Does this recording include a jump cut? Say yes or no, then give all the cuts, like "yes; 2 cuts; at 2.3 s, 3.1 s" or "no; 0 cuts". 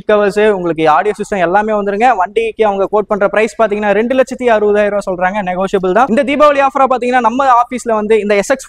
yes; 1 cut; at 6.1 s